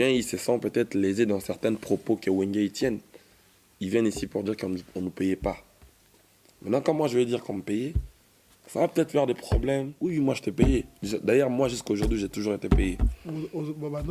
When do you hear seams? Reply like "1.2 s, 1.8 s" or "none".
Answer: 9.9 s